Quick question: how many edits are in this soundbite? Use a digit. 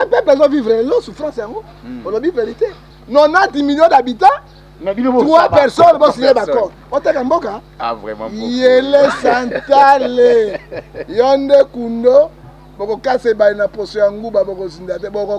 1